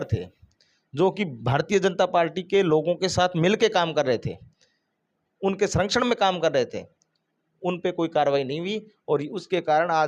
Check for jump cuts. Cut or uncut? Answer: uncut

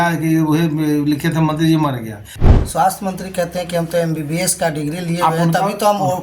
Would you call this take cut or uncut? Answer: cut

